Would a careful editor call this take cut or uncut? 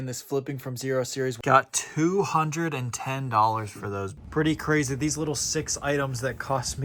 cut